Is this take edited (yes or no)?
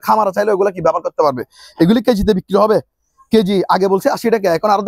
no